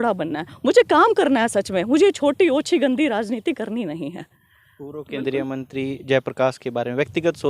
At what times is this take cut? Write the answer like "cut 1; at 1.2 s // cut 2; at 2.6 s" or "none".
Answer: none